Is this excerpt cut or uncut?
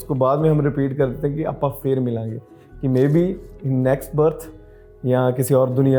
uncut